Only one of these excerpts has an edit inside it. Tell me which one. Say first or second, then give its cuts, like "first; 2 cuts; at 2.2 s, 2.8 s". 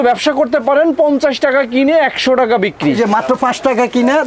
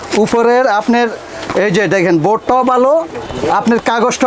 first; 1 cut; at 3.0 s